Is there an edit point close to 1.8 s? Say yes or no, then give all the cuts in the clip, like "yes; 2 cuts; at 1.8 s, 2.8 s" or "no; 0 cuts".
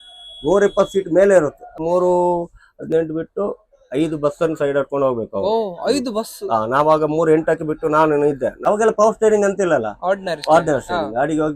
yes; 2 cuts; at 1.8 s, 8.7 s